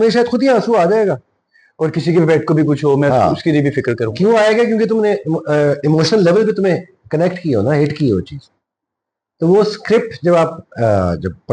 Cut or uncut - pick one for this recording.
uncut